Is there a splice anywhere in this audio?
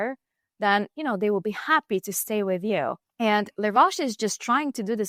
no; 0 cuts

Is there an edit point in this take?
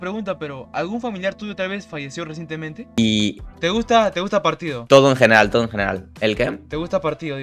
yes; 1 cut; at 2.8 s

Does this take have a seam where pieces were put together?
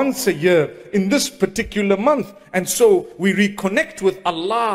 no; 0 cuts

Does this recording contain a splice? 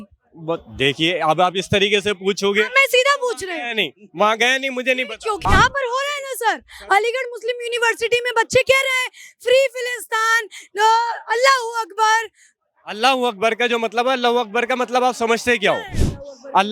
yes; 1 cut; at 5.4 s

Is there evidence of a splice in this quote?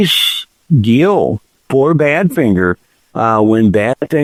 no; 0 cuts

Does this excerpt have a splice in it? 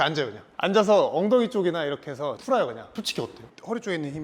yes; 1 cut; at 2.9 s

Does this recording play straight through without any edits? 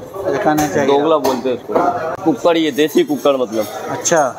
no; 1 cut; at 2.2 s

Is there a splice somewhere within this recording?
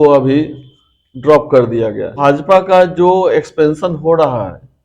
yes; 1 cut; at 2.1 s

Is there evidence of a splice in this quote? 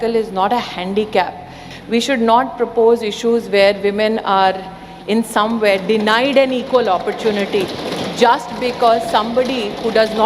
yes; 1 cut; at 1.7 s

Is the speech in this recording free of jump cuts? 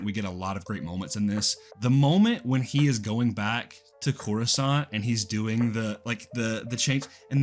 no; 1 cut; at 1.6 s

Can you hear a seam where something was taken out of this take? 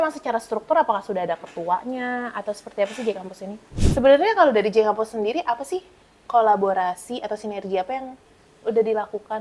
yes; 1 cut; at 3.7 s

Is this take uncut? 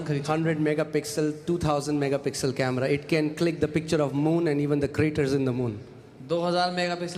yes; 0 cuts

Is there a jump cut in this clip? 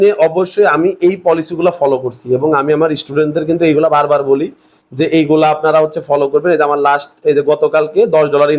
no; 0 cuts

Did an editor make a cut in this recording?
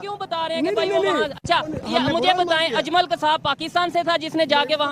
no; 0 cuts

